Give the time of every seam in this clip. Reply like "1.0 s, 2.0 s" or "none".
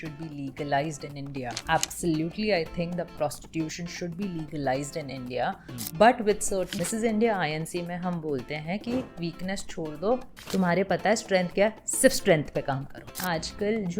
1.6 s, 3.1 s, 6.8 s, 13.2 s